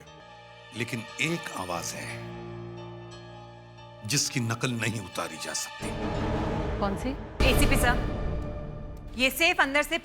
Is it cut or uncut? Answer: cut